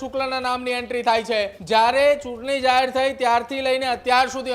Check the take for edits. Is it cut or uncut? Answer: cut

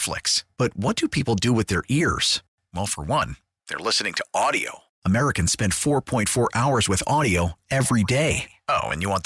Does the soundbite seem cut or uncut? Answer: uncut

